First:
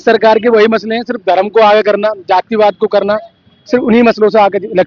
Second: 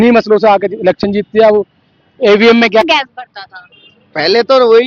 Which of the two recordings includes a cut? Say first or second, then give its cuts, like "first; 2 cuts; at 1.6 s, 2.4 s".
second; 1 cut; at 2.9 s